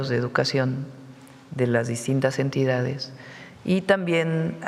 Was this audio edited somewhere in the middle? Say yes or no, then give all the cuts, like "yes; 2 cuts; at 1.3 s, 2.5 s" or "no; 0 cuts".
no; 0 cuts